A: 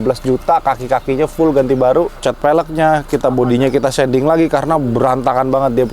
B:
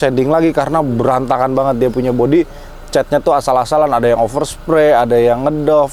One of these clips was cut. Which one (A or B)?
A